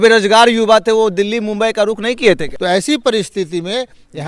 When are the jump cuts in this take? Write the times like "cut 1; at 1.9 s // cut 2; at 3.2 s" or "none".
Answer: cut 1; at 2.5 s